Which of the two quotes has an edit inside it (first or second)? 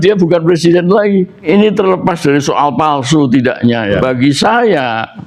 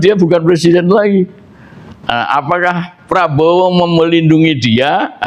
first